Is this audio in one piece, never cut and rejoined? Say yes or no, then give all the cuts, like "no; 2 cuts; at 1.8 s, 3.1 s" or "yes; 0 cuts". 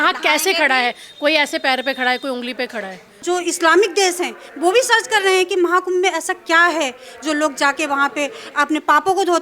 no; 1 cut; at 3.2 s